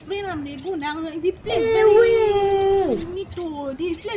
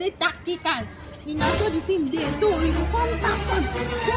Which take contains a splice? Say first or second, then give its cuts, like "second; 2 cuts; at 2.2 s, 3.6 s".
first; 2 cuts; at 1.6 s, 2.9 s